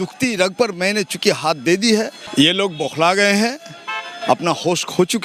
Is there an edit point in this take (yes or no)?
yes